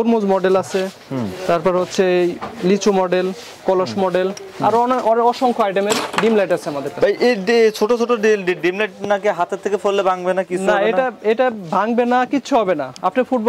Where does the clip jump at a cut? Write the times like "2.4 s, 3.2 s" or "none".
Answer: none

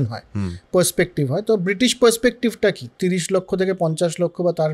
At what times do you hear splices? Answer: 2.9 s

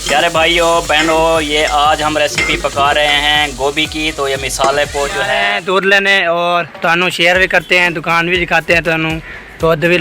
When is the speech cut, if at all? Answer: 5.4 s

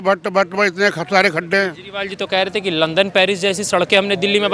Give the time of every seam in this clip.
none

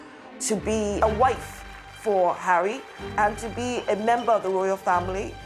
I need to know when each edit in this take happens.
1.0 s

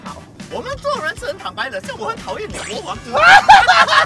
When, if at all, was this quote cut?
none

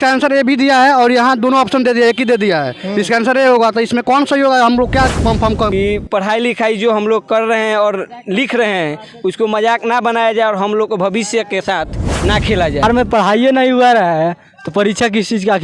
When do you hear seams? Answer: 5.7 s, 12.8 s

